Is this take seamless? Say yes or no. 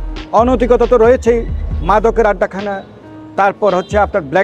yes